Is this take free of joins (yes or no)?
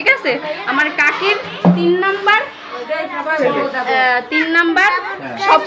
yes